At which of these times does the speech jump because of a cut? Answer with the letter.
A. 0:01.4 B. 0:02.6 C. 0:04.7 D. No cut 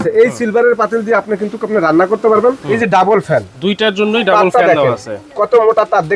B